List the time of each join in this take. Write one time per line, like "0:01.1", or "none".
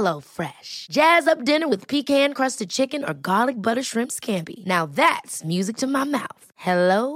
none